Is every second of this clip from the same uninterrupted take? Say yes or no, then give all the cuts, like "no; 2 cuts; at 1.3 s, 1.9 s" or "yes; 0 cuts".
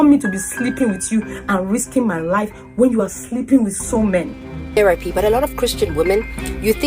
no; 1 cut; at 4.8 s